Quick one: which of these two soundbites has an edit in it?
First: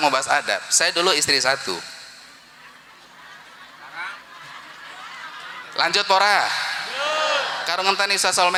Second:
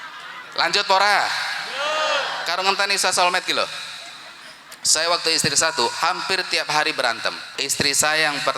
second; 1 cut; at 7.6 s

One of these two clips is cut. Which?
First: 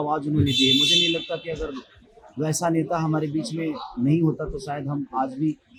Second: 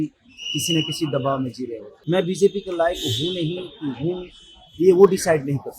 second; 1 cut; at 1.9 s

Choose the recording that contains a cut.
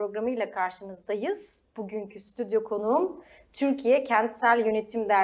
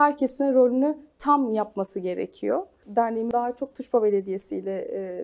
second; 1 cut; at 3.2 s

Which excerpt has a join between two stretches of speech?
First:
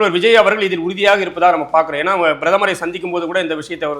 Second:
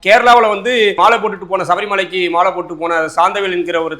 second; 1 cut; at 1.0 s

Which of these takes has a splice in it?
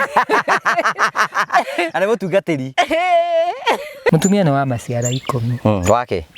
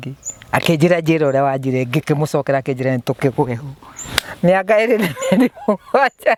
first; 1 cut; at 4.1 s

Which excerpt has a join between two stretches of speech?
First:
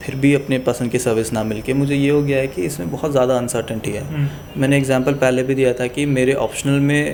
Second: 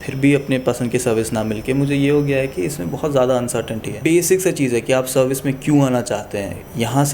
second; 1 cut; at 3.8 s

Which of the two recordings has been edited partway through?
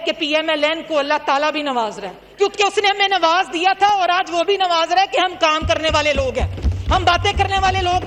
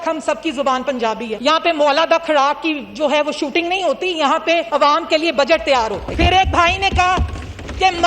second; 3 cuts; at 1.3 s, 4.7 s, 6.1 s

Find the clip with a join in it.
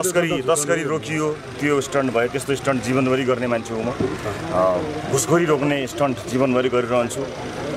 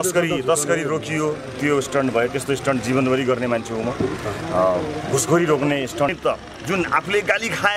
second; 1 cut; at 6.1 s

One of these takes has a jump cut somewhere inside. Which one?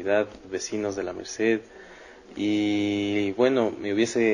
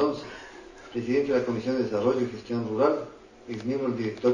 second; 1 cut; at 1.9 s

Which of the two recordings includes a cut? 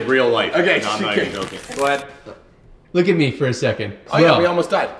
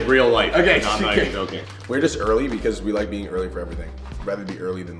first; 2 cuts; at 1.6 s, 4.0 s

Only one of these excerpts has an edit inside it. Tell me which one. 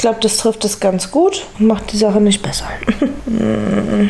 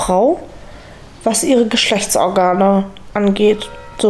first; 2 cuts; at 1.5 s, 3.2 s

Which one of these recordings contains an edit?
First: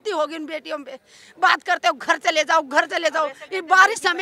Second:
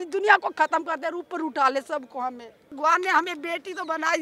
second; 1 cut; at 2.8 s

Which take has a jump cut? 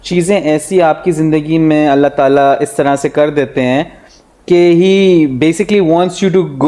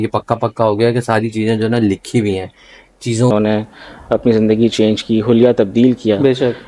second; 1 cut; at 3.3 s

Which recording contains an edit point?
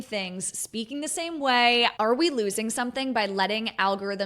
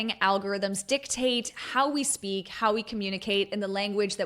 first; 1 cut; at 1.9 s

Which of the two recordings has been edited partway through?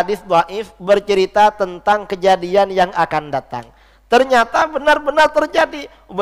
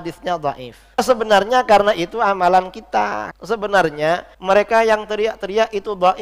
second; 3 cuts; at 1.0 s, 3.3 s, 4.3 s

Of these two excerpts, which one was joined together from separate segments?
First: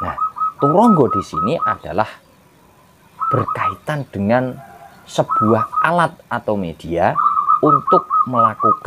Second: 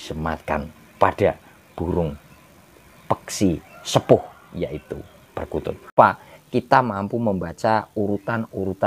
second; 1 cut; at 5.9 s

